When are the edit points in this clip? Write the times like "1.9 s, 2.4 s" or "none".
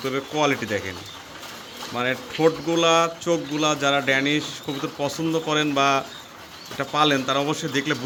none